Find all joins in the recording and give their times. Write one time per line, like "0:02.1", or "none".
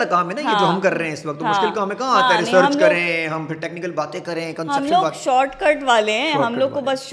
none